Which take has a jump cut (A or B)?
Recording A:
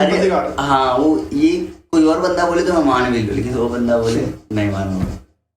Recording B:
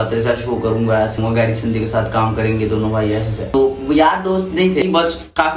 B